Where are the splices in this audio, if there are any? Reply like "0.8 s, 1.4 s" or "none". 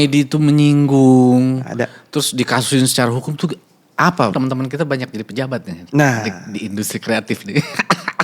4.3 s